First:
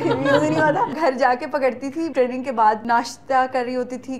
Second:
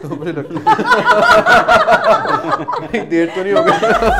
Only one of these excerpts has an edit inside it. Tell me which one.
first; 3 cuts; at 0.9 s, 2.1 s, 2.8 s

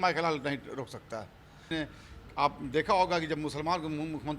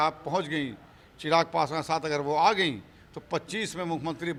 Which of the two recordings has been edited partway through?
first; 1 cut; at 1.7 s

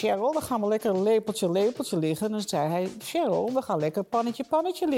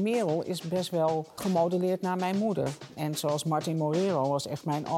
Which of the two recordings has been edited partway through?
second; 2 cuts; at 1.4 s, 2.9 s

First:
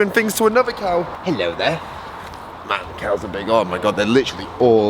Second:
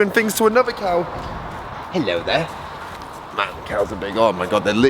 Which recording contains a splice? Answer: first; 1 cut; at 1.1 s

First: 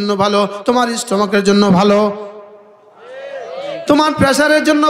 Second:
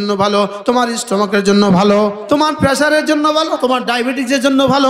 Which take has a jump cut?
second; 2 cuts; at 2.2 s, 3.6 s

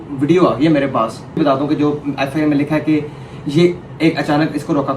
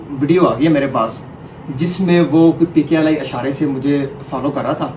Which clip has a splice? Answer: first; 1 cut; at 1.4 s

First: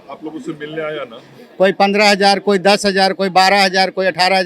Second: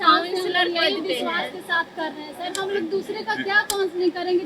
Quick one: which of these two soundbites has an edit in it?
first; 1 cut; at 1.4 s

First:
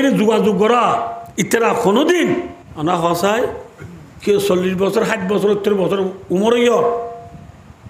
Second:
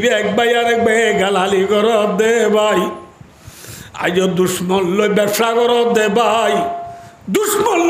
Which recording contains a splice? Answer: first; 2 cuts; at 1.2 s, 2.6 s

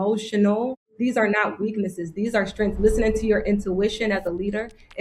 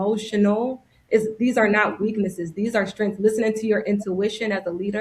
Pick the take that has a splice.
first; 1 cut; at 0.9 s

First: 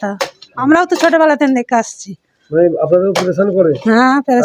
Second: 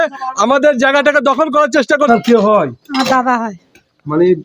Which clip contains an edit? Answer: second; 1 cut; at 2.0 s

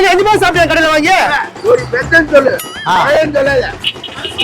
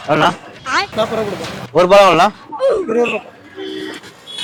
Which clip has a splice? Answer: first; 1 cut; at 1.5 s

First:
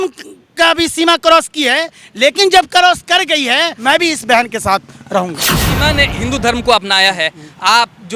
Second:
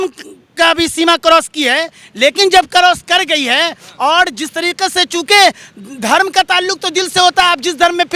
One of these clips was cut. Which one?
first; 2 cuts; at 3.8 s, 5.8 s

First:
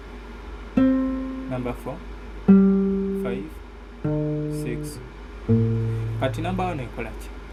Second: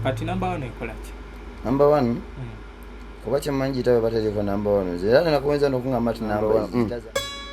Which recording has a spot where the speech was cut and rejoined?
second; 1 cut; at 6.4 s

